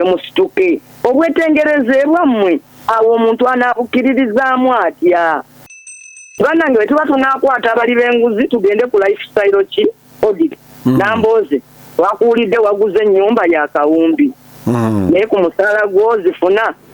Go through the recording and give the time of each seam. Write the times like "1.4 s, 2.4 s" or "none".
6.2 s